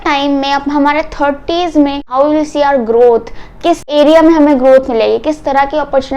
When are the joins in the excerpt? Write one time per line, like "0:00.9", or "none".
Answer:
0:02.0
0:03.9